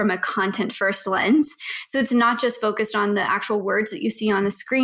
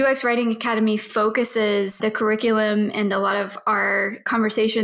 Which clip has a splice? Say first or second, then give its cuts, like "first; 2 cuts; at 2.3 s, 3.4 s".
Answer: second; 1 cut; at 1.9 s